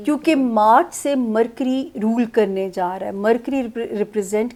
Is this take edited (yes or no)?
no